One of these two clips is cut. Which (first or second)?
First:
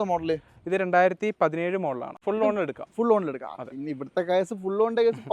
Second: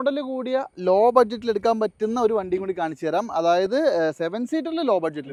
first